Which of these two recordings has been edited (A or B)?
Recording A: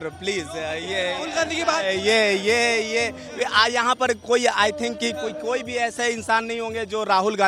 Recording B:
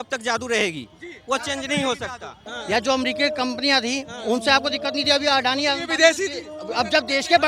B